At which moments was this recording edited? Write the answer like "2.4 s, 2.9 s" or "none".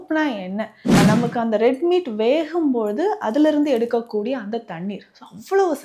1.0 s